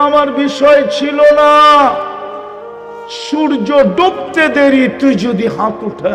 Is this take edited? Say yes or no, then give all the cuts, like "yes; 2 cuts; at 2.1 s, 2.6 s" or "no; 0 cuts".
no; 0 cuts